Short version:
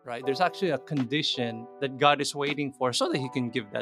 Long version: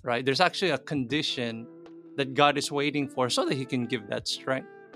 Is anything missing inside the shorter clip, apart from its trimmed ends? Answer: yes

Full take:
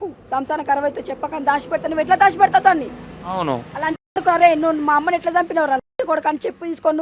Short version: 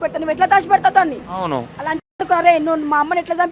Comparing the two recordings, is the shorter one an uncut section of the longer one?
no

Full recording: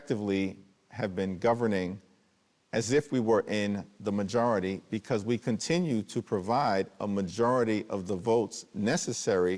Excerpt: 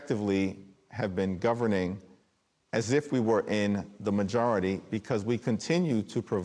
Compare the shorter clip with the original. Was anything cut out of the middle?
no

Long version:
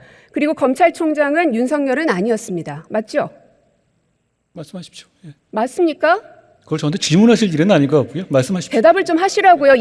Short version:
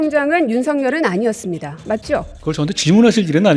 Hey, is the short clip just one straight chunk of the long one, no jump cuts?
no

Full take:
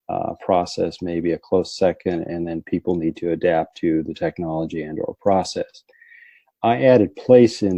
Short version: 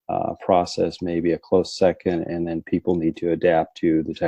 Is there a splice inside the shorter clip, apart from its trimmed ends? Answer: no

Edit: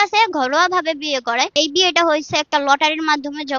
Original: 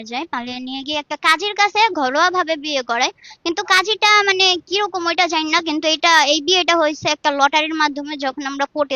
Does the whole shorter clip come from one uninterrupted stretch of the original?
no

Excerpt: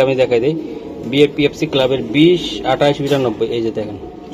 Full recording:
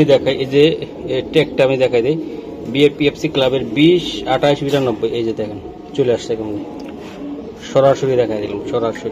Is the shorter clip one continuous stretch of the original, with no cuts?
yes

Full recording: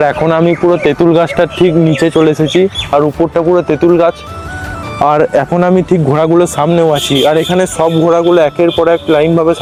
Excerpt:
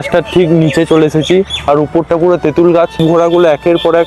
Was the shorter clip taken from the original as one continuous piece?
no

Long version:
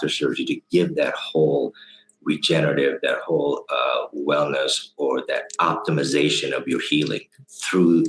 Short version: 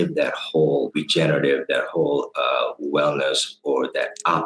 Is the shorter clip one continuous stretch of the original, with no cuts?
no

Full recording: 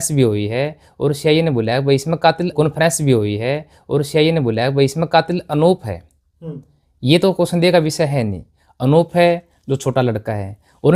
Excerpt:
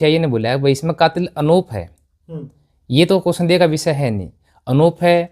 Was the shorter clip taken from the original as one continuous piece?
no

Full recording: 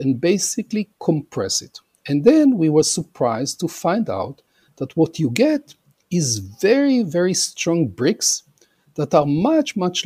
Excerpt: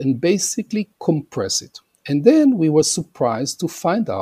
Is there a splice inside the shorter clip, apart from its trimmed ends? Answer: no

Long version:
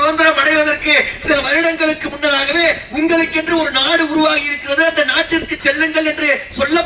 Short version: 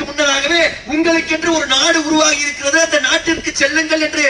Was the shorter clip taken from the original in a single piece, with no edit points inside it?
yes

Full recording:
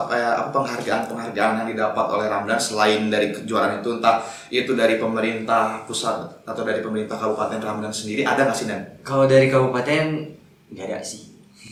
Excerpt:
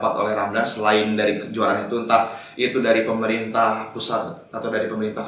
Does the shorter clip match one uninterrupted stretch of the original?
yes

